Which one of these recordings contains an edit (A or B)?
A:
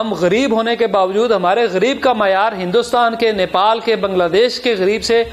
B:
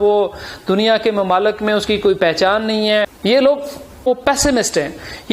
B